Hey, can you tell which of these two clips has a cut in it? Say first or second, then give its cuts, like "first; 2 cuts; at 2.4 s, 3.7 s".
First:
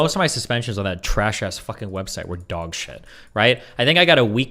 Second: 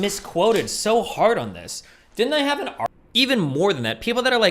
second; 1 cut; at 2.9 s